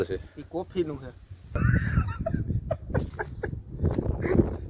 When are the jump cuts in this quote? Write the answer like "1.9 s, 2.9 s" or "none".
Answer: 1.6 s